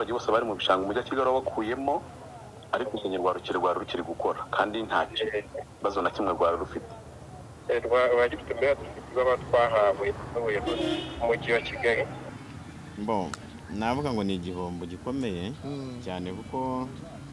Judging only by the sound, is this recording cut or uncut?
cut